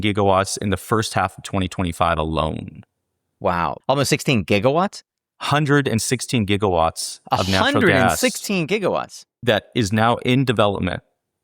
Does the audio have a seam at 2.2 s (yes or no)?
no